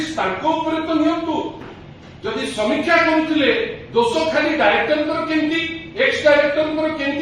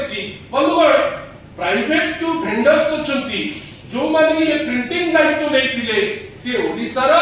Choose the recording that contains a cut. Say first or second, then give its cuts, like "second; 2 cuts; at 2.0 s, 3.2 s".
first; 1 cut; at 1.5 s